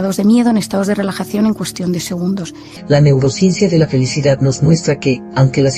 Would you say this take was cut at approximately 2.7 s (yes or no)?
yes